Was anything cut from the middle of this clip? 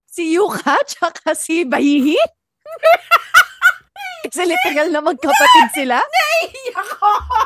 yes; 1 cut; at 1.5 s

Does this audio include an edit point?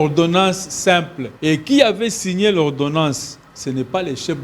yes; 1 cut; at 1.2 s

